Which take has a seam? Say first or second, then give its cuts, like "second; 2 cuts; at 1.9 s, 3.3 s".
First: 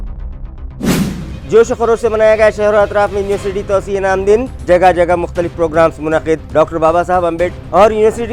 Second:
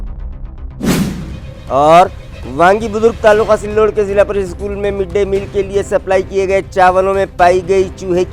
first; 1 cut; at 0.9 s